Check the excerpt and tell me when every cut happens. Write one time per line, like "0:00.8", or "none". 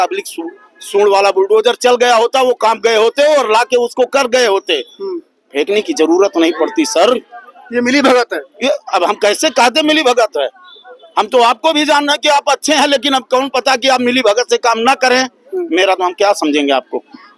none